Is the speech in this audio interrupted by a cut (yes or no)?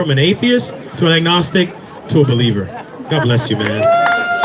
no